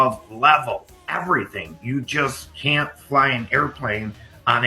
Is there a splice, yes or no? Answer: yes